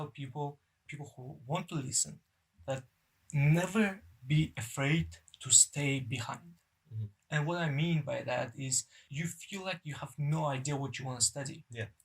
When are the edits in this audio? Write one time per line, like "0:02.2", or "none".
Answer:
0:00.9
0:02.8
0:09.0